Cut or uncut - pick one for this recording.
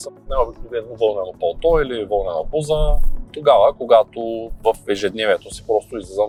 uncut